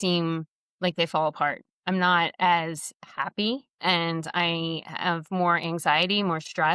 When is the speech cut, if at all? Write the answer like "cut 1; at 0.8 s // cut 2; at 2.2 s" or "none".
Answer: none